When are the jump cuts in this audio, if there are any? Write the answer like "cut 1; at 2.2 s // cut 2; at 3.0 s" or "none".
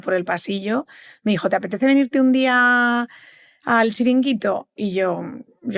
none